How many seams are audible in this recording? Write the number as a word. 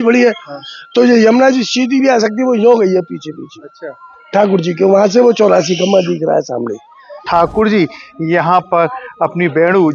one